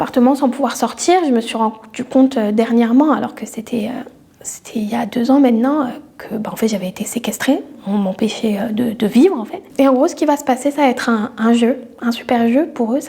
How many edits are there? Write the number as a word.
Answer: zero